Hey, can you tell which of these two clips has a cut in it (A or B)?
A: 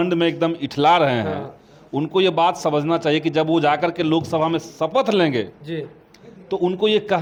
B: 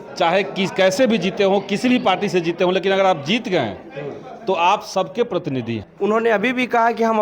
B